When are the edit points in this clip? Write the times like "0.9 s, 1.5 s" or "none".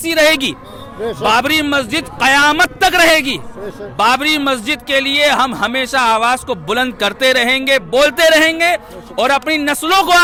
none